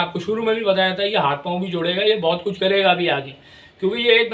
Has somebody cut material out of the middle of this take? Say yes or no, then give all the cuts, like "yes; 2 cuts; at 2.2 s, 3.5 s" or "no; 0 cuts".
no; 0 cuts